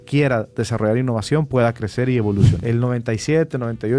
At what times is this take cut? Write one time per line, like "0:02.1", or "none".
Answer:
0:02.5